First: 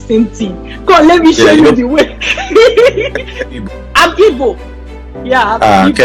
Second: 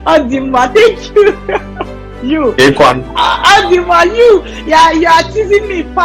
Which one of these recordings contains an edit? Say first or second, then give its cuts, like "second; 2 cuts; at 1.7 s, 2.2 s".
first; 1 cut; at 3.6 s